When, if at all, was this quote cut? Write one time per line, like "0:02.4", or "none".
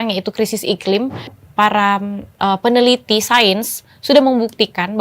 0:01.3